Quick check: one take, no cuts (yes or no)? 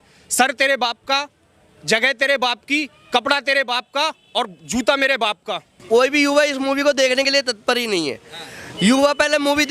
no